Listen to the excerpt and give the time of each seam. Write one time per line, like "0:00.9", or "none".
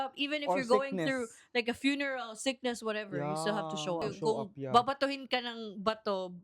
0:04.2